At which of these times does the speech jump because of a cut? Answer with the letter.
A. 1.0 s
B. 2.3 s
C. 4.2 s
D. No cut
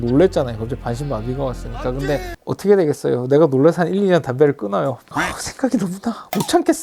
B